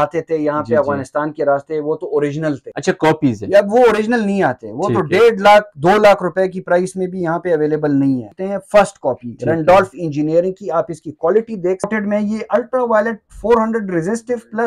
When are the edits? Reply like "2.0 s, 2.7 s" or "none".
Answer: 2.7 s, 8.3 s, 11.9 s

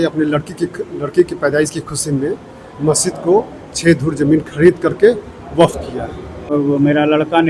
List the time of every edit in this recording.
6.5 s

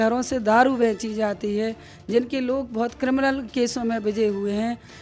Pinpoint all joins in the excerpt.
none

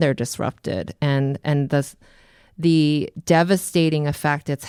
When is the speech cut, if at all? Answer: none

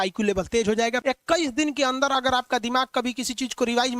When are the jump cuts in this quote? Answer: 1.0 s

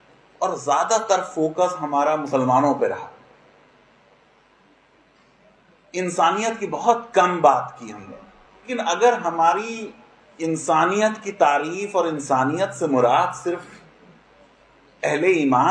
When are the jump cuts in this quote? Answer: 8.7 s

